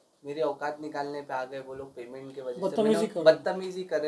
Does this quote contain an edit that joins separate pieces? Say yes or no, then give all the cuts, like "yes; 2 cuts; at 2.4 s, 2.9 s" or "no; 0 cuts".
no; 0 cuts